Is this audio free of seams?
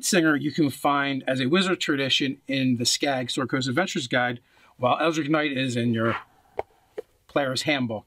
no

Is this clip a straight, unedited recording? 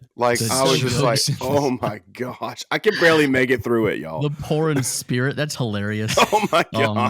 yes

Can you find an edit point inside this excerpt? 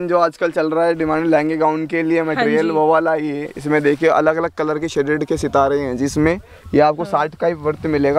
no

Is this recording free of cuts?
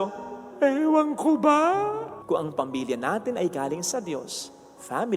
no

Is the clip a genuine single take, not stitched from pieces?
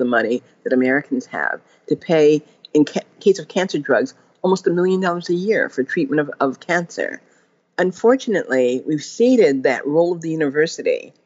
no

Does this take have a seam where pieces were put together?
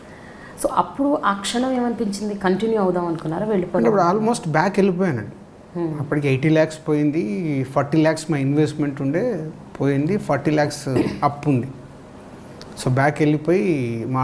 no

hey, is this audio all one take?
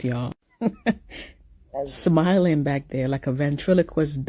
yes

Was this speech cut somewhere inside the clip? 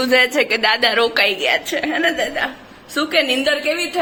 no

